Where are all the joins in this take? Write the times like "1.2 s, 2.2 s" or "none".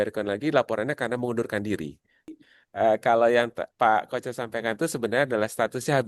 2.4 s